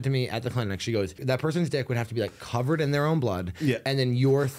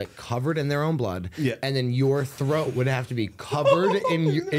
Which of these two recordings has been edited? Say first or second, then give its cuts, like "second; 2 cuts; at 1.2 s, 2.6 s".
first; 1 cut; at 1.2 s